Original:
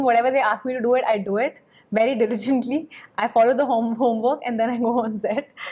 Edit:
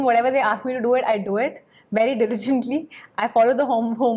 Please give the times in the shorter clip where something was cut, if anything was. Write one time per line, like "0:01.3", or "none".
none